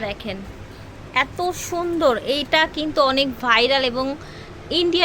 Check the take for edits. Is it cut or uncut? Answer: uncut